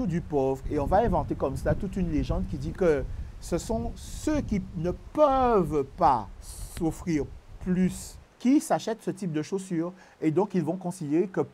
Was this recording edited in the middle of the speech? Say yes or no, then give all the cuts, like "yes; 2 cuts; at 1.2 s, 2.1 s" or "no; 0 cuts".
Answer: yes; 2 cuts; at 2.7 s, 8.2 s